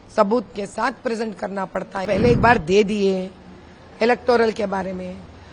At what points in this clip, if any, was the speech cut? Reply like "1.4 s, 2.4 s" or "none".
2.0 s